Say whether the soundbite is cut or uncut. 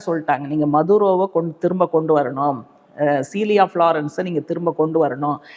uncut